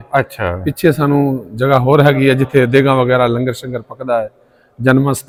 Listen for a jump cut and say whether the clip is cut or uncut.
uncut